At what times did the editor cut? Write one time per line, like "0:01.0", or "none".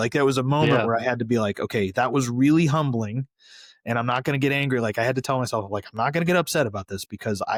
none